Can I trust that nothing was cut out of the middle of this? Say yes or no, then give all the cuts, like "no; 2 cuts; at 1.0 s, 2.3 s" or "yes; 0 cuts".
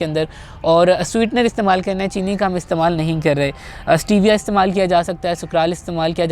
yes; 0 cuts